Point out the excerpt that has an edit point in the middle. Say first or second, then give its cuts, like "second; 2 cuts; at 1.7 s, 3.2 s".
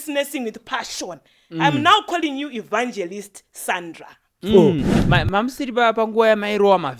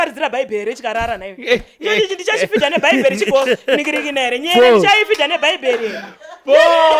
first; 1 cut; at 5.0 s